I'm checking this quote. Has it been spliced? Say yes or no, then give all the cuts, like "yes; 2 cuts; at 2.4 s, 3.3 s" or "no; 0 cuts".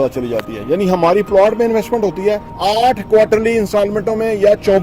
yes; 1 cut; at 2.5 s